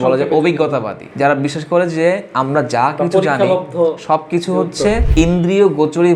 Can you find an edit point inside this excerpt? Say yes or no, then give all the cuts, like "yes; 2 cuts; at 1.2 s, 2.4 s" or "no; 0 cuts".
yes; 2 cuts; at 1.0 s, 5.0 s